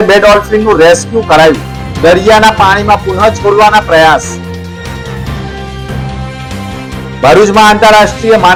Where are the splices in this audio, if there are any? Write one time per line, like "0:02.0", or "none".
none